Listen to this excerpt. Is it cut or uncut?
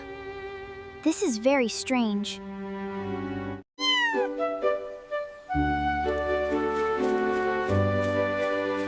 uncut